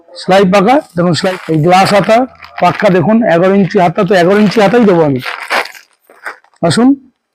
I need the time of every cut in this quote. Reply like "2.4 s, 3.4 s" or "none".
1.2 s